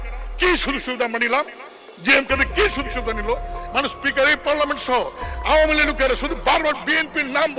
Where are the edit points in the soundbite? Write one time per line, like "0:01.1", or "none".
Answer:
0:03.6